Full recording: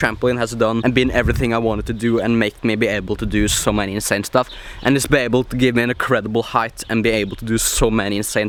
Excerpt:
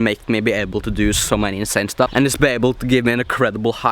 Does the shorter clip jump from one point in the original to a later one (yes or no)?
yes